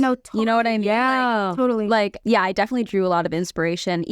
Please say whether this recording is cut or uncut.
cut